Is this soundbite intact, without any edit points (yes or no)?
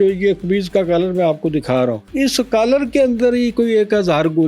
no